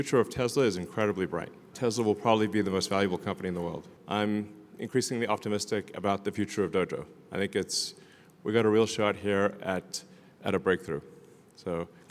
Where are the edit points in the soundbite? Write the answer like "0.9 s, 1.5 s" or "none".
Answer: 1.7 s, 3.9 s